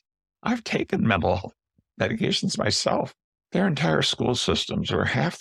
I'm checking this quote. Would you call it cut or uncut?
cut